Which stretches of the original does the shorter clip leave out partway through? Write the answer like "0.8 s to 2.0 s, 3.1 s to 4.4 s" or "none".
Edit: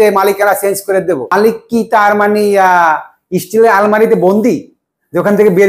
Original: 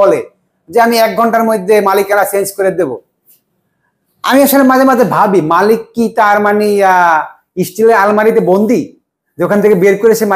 3.0 s to 5.6 s